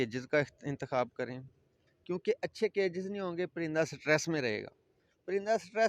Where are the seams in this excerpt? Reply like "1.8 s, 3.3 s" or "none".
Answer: none